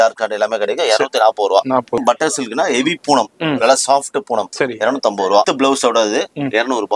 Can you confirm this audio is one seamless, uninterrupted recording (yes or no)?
no